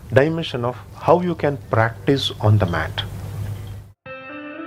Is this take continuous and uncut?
yes; 0 cuts

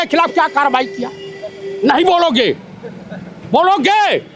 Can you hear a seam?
no; 0 cuts

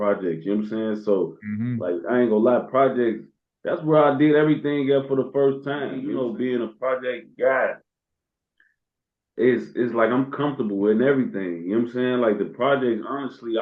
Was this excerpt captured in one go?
no; 1 cut; at 6.0 s

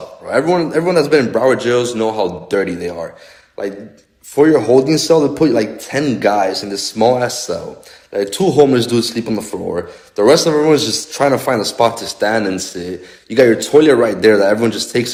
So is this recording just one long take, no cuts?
yes; 0 cuts

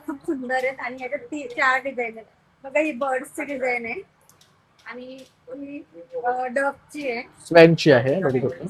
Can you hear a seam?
no; 0 cuts

